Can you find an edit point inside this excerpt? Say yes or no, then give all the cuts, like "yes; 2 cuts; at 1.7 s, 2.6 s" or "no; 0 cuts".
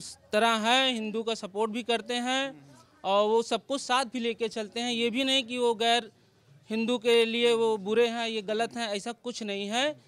no; 0 cuts